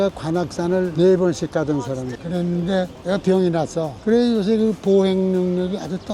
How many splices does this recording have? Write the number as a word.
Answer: one